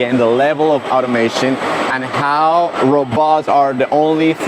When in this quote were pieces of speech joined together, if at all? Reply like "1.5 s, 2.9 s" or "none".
none

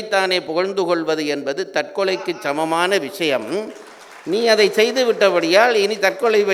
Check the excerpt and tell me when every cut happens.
none

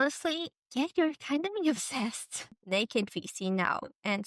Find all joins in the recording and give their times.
2.5 s

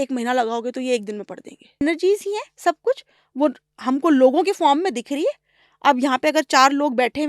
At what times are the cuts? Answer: 1.8 s

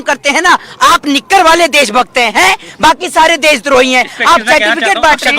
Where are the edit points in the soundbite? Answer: none

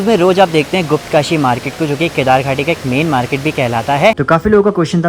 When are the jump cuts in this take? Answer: 4.2 s

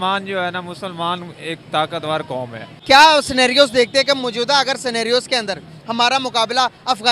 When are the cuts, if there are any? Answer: 2.6 s

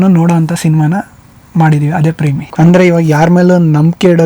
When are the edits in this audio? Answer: 2.5 s

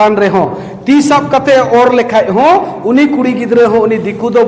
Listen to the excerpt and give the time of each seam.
none

